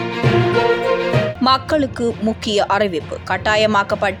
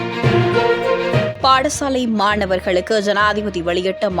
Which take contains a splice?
second; 1 cut; at 1.3 s

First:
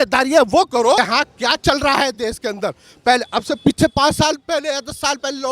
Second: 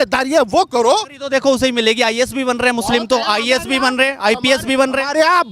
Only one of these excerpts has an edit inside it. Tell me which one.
first; 1 cut; at 1.0 s

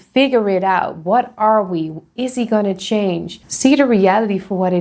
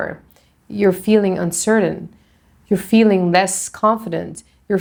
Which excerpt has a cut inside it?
first; 1 cut; at 3.4 s

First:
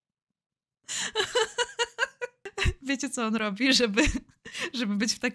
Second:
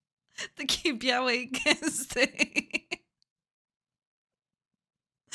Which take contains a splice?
first; 1 cut; at 2.5 s

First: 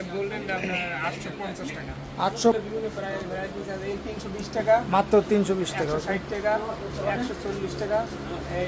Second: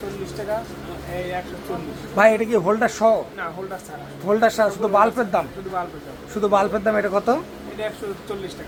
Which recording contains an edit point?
first; 1 cut; at 2.5 s

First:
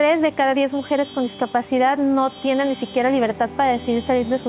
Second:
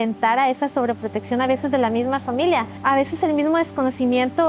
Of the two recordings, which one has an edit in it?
second; 1 cut; at 2.7 s

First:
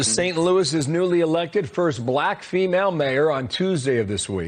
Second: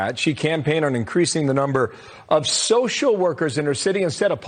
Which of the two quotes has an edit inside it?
first; 1 cut; at 3.4 s

